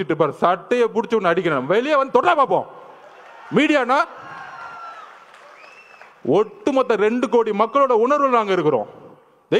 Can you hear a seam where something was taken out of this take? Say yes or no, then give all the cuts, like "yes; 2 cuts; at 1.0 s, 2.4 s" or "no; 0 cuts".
no; 0 cuts